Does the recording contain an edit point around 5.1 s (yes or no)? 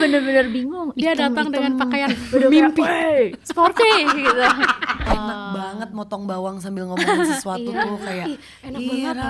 yes